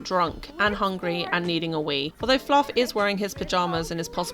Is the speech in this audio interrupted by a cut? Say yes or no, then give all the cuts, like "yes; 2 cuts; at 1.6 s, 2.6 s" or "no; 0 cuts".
no; 0 cuts